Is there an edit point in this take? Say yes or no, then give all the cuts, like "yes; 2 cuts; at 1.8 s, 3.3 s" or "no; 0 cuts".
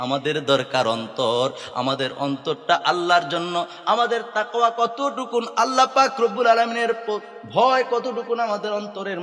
no; 0 cuts